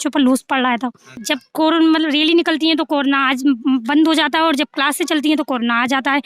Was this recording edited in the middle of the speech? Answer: yes; 1 cut; at 1.2 s

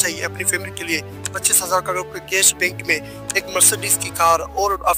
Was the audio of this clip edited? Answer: no; 0 cuts

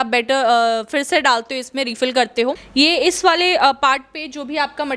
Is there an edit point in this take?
yes; 1 cut; at 2.6 s

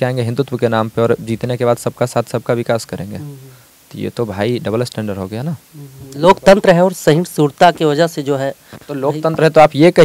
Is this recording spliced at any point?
no; 0 cuts

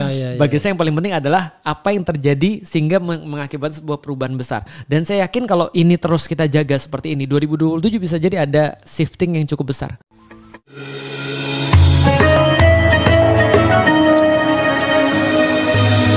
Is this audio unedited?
no; 1 cut; at 10.2 s

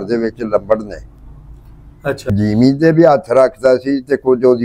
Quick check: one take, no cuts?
no; 1 cut; at 2.3 s

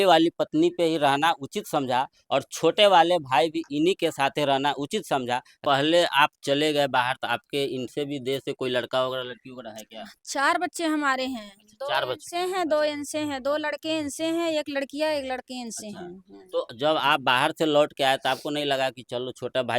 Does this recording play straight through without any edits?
no; 1 cut; at 5.5 s

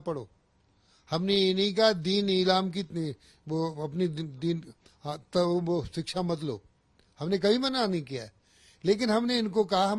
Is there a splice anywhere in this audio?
no; 0 cuts

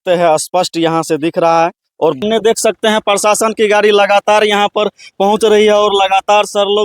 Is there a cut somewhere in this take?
yes; 1 cut; at 2.2 s

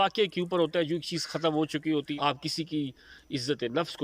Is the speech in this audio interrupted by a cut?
yes; 1 cut; at 2.1 s

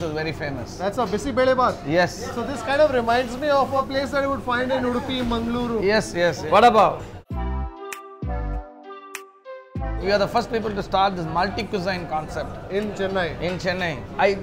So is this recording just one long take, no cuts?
yes; 0 cuts

